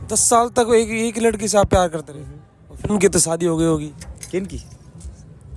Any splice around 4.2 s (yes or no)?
no